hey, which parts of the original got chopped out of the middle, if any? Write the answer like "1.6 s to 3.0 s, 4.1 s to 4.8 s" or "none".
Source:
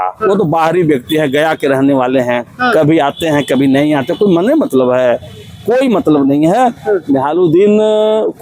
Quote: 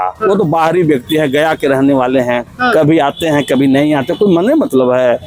none